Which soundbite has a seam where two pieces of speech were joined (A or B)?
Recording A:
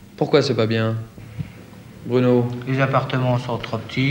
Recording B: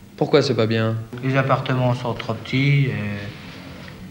B